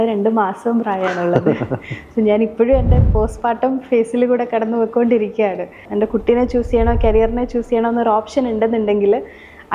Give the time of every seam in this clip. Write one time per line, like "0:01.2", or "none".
0:05.8

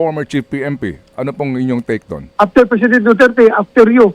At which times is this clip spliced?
0:02.2

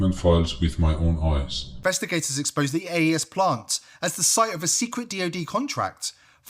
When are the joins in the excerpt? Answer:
0:01.8

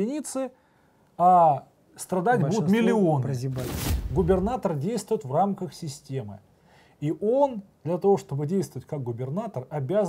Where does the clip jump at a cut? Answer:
0:03.8

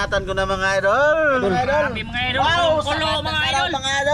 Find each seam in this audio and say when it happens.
0:01.4

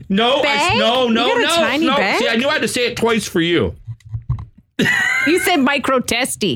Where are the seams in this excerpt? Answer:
none

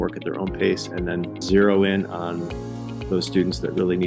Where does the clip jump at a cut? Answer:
0:01.4

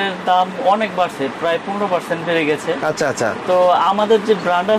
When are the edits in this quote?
none

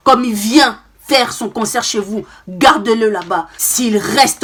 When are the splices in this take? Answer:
none

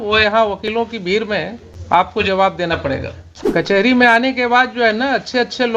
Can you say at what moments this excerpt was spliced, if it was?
0:01.7
0:03.7

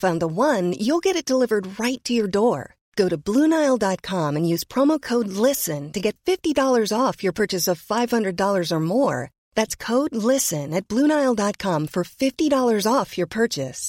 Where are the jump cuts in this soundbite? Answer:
none

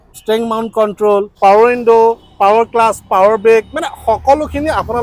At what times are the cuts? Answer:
none

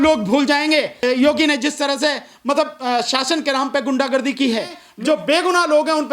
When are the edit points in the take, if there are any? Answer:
0:01.0
0:04.8

